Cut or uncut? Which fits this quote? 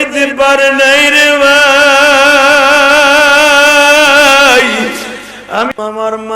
uncut